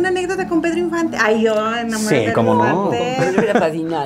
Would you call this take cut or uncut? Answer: uncut